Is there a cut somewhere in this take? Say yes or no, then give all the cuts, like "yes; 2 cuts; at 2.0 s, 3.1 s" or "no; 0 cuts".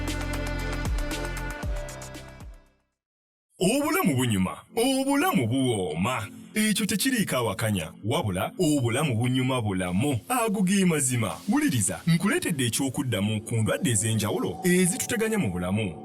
yes; 1 cut; at 3.4 s